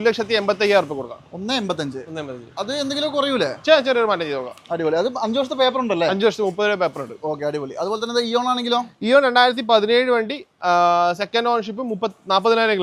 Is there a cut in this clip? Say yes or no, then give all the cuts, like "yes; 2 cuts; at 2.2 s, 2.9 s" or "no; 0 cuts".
no; 0 cuts